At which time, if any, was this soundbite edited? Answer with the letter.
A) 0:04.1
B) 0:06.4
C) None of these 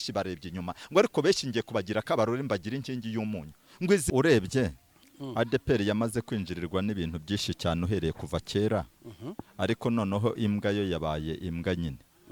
A